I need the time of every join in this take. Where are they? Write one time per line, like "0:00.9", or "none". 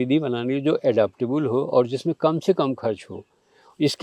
none